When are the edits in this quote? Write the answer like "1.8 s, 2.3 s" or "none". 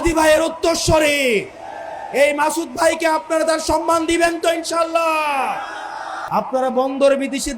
6.1 s